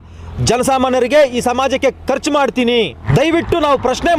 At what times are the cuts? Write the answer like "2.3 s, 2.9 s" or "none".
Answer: 3.0 s